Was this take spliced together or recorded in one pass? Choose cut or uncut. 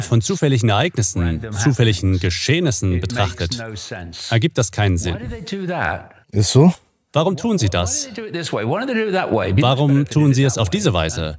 uncut